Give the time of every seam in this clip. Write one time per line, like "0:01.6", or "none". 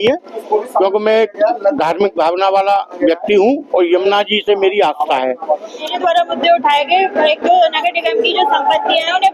0:05.9